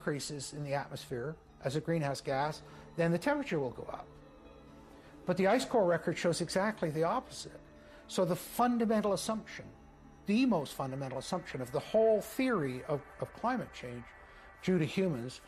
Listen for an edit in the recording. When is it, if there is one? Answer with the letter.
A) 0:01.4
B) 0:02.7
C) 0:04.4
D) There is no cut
D